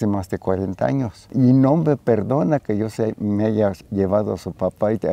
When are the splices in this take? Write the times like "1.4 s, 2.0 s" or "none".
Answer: 1.3 s